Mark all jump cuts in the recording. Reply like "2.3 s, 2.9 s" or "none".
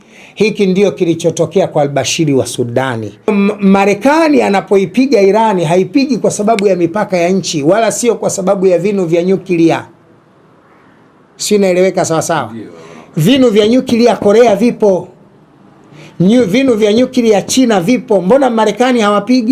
3.3 s